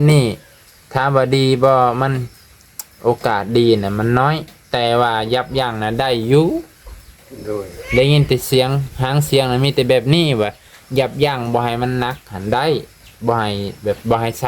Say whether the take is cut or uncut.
uncut